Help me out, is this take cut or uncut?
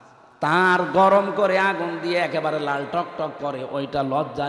uncut